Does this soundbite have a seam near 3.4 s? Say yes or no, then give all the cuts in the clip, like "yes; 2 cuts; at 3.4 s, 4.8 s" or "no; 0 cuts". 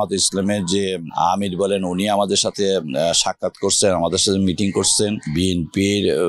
no; 1 cut; at 5.3 s